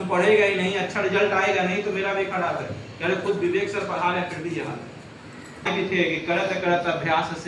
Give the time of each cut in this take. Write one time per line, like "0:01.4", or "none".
0:05.7